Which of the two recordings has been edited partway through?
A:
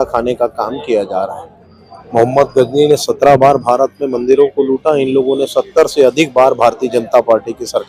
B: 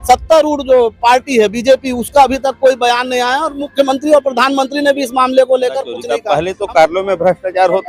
B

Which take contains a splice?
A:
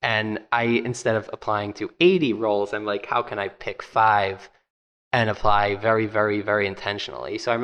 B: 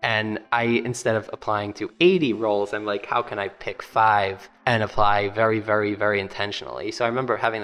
B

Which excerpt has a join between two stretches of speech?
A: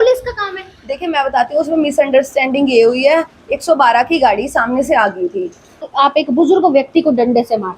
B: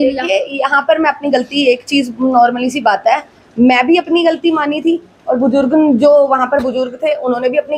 A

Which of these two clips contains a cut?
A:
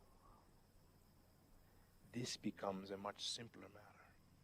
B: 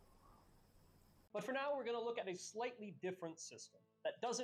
A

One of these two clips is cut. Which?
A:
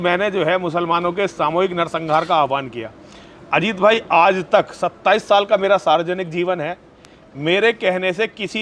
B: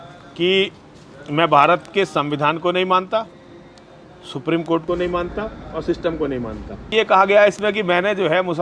B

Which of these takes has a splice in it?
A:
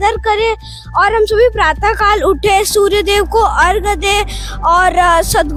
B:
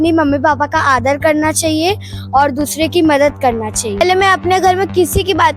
B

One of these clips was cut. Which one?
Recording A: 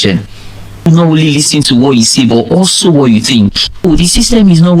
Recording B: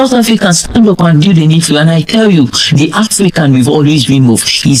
A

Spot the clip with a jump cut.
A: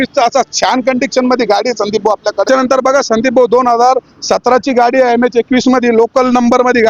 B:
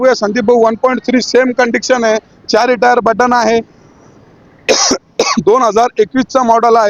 A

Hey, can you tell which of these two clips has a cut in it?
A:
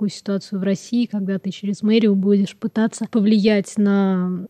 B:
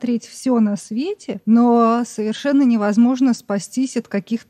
B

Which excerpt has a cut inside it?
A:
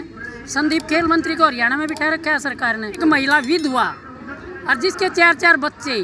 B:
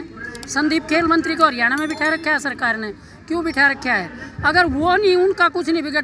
A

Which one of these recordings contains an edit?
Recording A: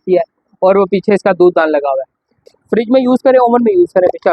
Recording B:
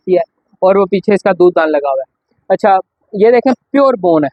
A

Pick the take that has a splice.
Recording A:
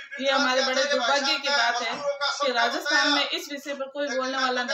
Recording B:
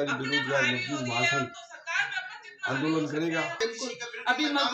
B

